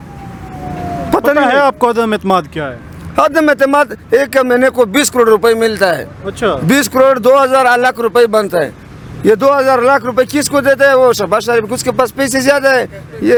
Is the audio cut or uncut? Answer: uncut